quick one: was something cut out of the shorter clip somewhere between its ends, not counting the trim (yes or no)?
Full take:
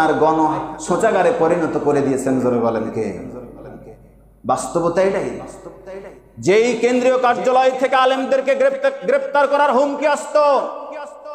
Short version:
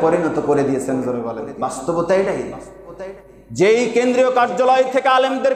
yes